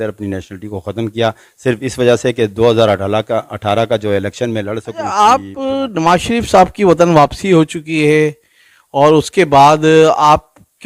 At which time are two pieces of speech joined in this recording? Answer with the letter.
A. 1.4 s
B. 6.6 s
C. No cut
C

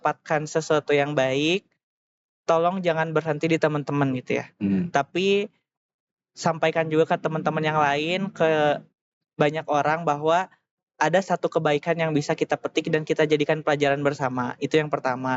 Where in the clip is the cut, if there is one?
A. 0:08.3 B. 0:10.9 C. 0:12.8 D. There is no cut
D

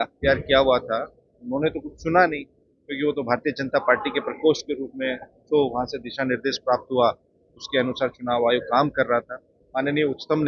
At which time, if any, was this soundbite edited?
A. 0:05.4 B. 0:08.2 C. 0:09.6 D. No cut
C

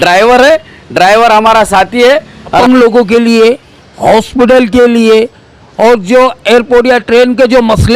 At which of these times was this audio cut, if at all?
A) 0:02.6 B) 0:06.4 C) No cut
A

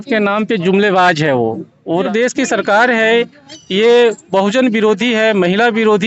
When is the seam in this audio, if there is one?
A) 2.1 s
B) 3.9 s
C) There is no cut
A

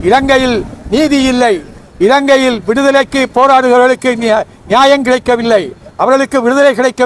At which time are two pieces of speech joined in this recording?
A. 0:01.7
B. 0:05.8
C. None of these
C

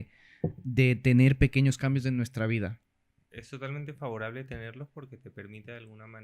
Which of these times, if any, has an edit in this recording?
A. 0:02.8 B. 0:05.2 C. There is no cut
A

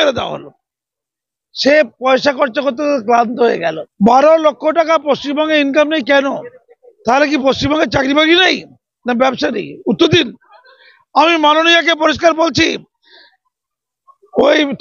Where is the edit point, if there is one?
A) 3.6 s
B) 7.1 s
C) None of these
A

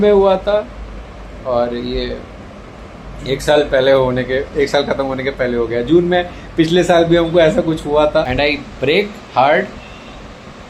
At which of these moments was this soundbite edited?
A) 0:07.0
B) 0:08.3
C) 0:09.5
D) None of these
B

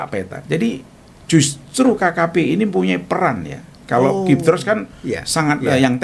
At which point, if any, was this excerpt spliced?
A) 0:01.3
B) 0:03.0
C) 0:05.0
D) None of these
D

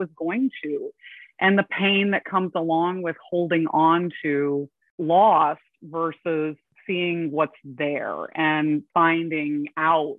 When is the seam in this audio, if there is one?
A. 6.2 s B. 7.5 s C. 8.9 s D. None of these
C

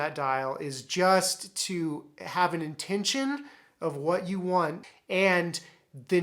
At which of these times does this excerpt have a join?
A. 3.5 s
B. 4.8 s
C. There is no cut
B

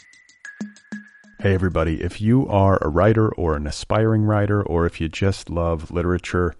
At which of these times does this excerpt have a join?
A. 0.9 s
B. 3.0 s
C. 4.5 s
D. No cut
A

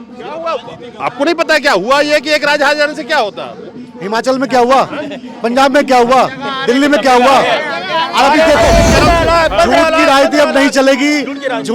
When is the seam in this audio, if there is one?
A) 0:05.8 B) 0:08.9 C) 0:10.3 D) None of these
B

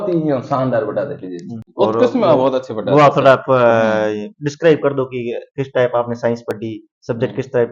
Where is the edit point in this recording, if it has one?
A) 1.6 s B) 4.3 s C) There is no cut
A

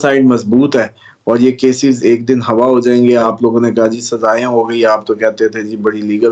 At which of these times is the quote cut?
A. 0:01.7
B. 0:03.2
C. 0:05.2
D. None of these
D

